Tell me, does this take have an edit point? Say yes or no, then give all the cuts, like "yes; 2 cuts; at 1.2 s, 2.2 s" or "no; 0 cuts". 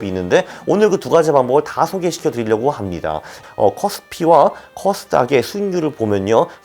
yes; 1 cut; at 3.3 s